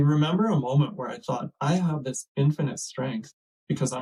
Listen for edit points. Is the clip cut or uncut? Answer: uncut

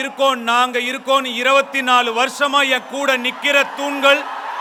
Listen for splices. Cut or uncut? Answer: uncut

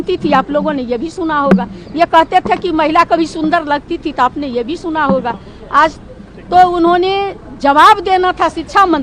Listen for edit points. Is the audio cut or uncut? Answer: uncut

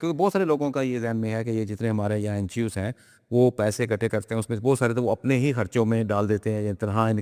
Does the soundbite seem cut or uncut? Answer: uncut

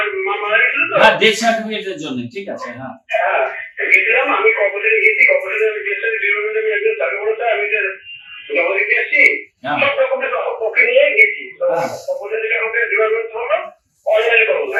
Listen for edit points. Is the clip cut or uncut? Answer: uncut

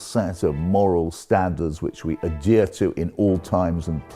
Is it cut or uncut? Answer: uncut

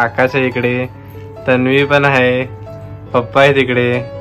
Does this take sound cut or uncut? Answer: uncut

